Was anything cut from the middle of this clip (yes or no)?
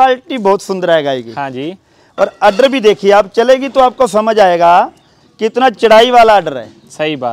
no